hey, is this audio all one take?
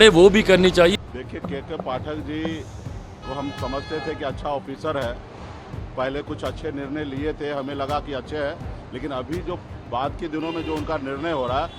no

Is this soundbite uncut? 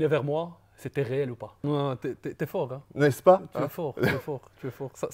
no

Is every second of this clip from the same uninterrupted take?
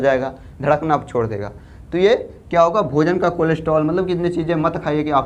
yes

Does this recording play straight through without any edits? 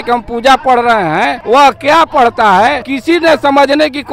no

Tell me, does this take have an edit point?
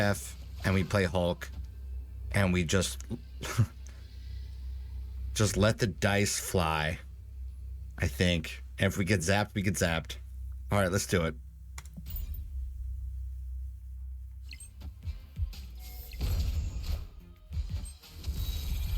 no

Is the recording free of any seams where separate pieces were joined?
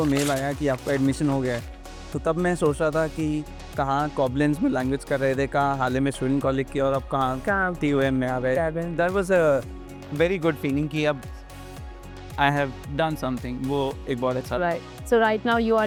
yes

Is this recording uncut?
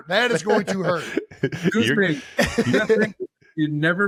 yes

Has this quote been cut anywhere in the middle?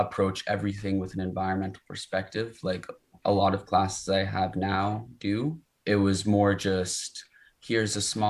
yes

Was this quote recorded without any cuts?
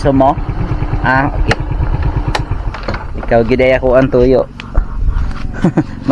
yes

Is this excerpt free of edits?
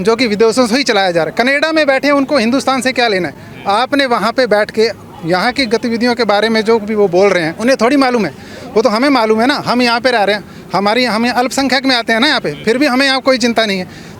yes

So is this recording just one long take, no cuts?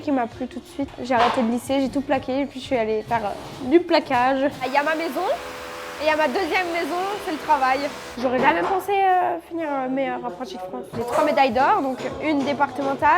no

